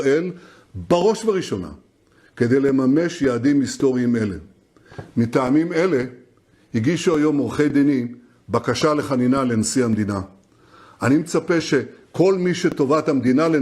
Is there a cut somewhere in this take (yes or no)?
yes